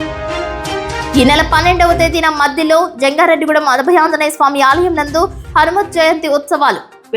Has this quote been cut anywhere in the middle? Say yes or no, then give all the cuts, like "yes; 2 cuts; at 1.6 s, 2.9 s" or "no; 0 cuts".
yes; 1 cut; at 1.1 s